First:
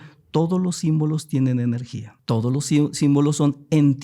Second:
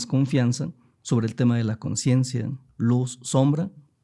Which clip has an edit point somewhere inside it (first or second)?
first